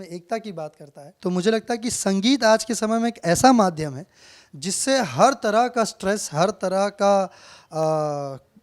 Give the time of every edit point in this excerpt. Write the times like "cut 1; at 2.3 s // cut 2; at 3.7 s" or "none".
cut 1; at 1.0 s